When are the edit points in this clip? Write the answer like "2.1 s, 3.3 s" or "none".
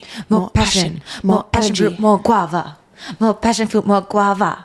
none